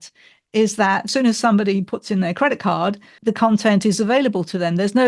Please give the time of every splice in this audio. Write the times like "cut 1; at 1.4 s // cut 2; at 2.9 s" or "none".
cut 1; at 1.1 s // cut 2; at 3.2 s